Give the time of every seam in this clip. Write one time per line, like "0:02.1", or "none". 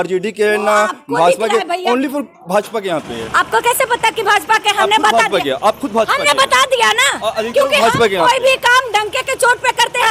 none